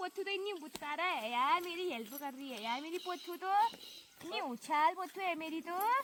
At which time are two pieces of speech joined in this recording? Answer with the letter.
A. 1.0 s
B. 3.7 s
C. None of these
C